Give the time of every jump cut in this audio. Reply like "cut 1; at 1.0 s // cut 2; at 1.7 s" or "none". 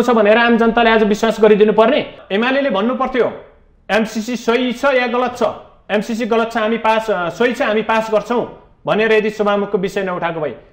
cut 1; at 2.2 s